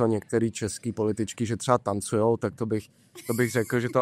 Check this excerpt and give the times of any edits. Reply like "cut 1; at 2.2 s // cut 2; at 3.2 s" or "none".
none